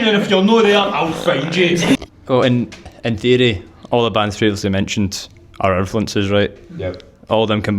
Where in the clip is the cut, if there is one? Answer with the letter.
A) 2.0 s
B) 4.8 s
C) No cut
A